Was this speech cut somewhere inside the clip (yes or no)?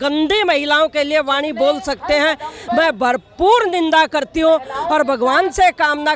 no